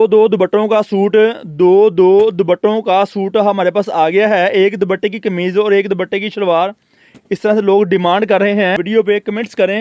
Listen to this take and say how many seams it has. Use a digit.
1